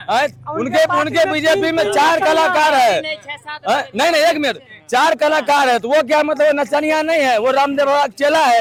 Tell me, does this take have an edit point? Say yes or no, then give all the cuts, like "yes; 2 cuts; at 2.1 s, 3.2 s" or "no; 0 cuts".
no; 0 cuts